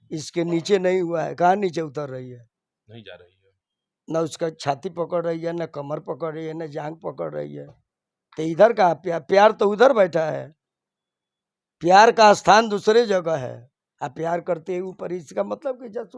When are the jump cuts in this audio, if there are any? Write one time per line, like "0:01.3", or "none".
none